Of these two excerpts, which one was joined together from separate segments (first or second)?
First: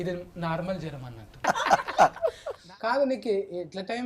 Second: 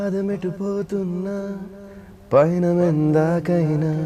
first